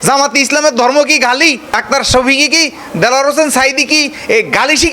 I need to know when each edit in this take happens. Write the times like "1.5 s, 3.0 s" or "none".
1.7 s